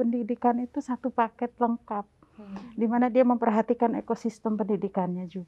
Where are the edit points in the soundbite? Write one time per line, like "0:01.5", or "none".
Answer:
none